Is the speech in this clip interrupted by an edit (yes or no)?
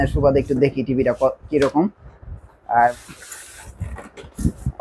yes